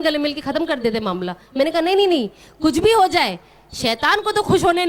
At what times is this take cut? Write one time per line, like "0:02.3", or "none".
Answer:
none